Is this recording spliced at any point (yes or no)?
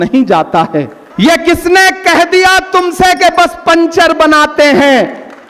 yes